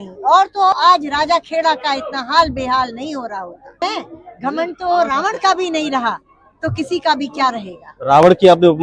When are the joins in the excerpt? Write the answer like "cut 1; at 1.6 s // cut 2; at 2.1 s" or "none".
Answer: cut 1; at 0.7 s // cut 2; at 3.8 s